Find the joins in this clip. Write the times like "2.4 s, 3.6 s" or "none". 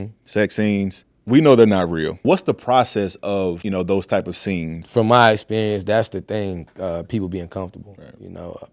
2.2 s, 3.6 s, 4.8 s